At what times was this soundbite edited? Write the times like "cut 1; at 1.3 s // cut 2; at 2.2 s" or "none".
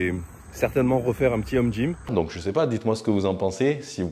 cut 1; at 2.0 s